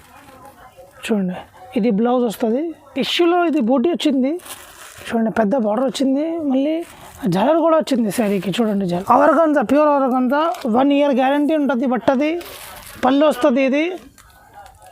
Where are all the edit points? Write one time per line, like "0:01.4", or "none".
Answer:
0:02.8
0:08.8